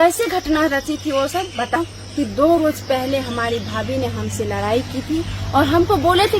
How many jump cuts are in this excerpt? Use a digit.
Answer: 1